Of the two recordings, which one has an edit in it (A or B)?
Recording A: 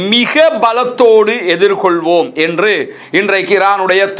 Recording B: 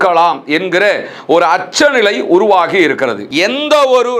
B